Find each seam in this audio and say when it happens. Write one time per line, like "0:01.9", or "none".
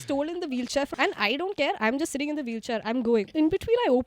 0:00.9
0:03.3